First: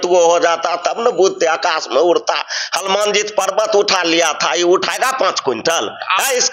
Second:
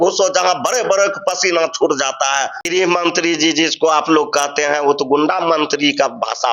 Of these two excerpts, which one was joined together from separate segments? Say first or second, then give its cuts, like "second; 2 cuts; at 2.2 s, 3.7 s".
second; 1 cut; at 2.6 s